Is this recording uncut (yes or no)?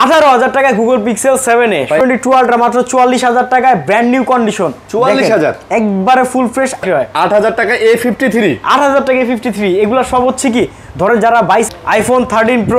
no